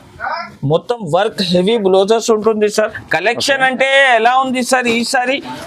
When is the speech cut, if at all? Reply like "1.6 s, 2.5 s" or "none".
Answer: 3.0 s